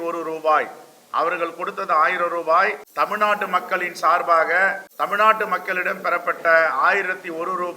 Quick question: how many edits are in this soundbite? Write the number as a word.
two